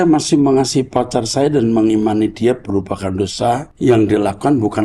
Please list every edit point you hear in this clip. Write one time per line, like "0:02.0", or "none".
0:03.7